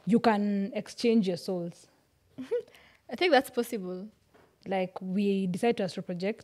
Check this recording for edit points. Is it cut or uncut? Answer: uncut